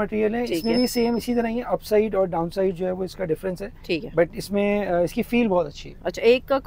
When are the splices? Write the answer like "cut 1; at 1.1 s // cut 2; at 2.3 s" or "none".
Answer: none

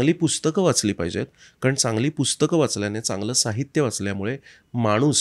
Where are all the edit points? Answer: none

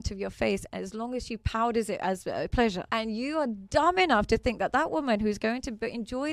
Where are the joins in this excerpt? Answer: cut 1; at 2.8 s

